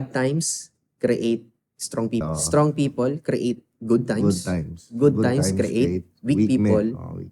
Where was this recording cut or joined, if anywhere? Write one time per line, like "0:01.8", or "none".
0:02.2